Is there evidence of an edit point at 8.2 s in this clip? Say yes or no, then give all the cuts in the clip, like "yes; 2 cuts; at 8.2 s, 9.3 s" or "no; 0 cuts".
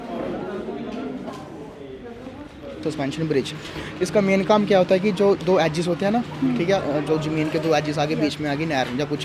no; 1 cut; at 2.8 s